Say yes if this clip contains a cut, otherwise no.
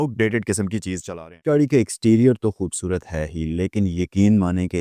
yes